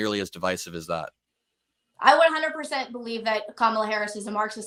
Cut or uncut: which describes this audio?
uncut